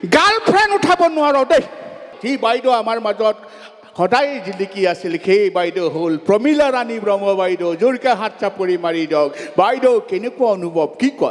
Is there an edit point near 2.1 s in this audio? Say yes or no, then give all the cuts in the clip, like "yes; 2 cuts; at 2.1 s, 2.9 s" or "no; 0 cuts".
yes; 1 cut; at 2.1 s